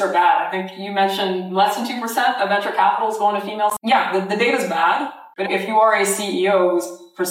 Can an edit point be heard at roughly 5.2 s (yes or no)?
yes